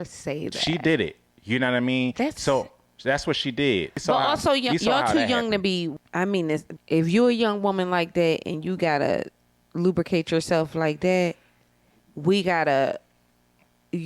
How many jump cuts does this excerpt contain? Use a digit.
3